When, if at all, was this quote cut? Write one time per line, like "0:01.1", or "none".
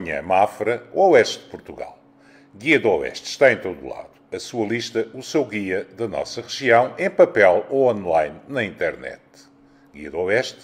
none